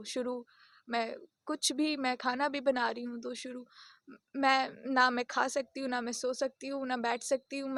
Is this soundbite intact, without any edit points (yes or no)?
yes